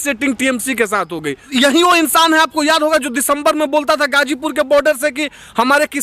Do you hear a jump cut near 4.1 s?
no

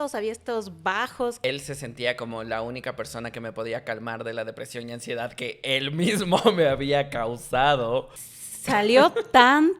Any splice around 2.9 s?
no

